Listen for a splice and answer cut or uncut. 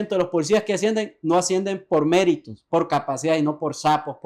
uncut